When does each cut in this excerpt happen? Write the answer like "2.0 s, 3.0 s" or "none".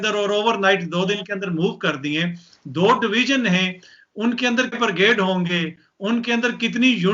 4.8 s

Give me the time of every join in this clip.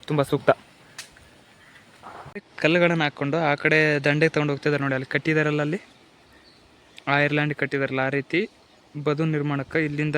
2.5 s

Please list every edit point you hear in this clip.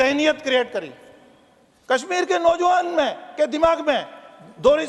none

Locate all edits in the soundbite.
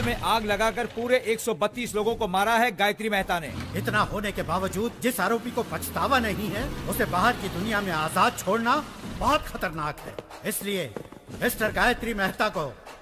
3.5 s

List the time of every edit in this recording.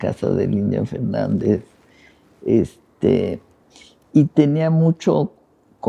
none

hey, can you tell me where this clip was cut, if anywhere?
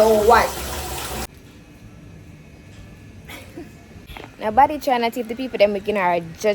1.3 s, 4.1 s

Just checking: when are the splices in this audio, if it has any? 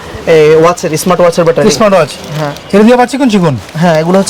none

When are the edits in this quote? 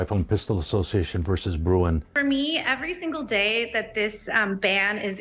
2.1 s

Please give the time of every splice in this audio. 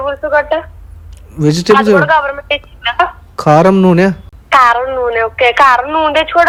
none

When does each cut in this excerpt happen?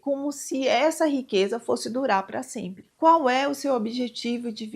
2.8 s

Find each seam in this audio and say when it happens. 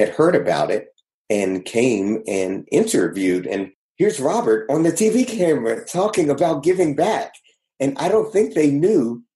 3.8 s

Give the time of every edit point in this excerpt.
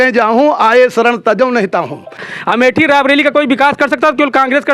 2.2 s

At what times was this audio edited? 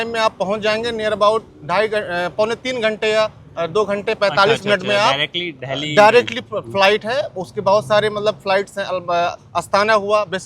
none

